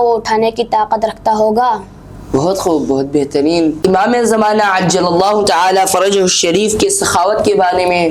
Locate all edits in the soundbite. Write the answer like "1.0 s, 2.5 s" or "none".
none